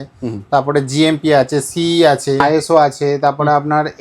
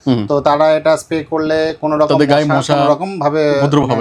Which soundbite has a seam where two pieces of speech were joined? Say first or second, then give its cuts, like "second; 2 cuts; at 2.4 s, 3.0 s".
first; 1 cut; at 2.4 s